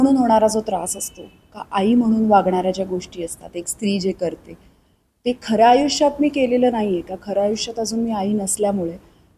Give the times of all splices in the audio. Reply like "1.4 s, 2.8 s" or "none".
none